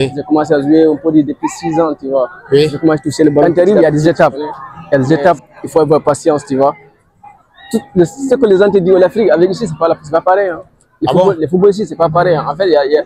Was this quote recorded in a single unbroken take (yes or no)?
no